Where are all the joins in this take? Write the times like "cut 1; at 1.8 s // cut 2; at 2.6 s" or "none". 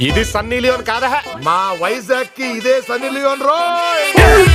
none